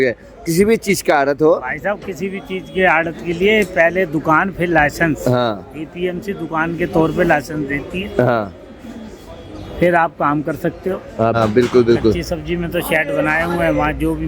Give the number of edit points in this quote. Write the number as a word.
one